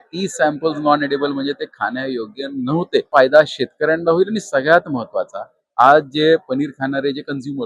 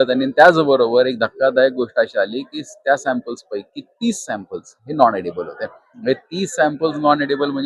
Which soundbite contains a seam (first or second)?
first